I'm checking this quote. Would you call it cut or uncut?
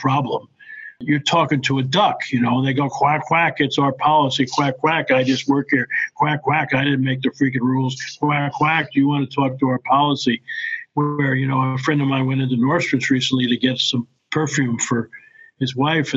cut